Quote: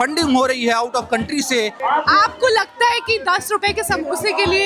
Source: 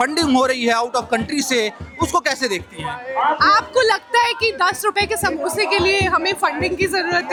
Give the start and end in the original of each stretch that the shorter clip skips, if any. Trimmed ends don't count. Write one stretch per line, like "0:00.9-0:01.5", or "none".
0:01.8-0:03.1